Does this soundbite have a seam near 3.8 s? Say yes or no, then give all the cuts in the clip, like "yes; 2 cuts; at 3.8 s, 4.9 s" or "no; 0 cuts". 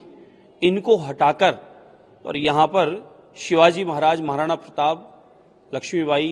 no; 0 cuts